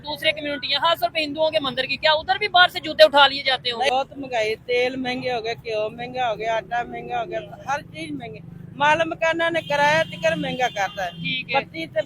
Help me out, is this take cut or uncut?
cut